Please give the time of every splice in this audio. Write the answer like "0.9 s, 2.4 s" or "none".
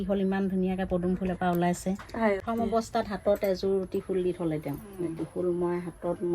2.4 s